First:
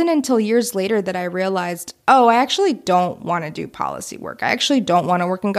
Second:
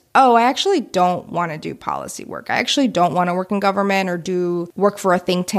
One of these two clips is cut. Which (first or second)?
second